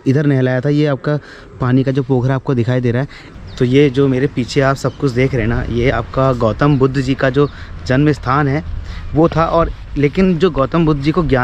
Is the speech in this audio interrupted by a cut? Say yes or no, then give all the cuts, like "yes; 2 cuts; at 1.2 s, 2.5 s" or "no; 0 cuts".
no; 0 cuts